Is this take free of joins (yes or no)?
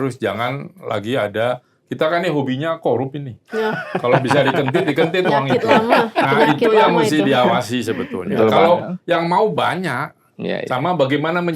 yes